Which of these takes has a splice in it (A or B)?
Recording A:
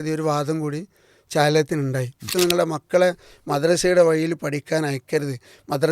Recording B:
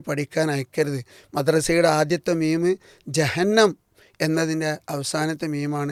A